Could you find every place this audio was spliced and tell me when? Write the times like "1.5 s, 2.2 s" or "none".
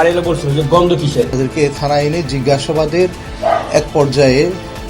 1.3 s